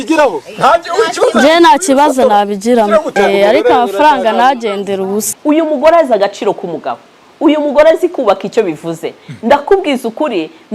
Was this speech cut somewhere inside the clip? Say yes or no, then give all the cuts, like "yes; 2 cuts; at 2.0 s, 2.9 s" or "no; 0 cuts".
yes; 2 cuts; at 3.1 s, 5.3 s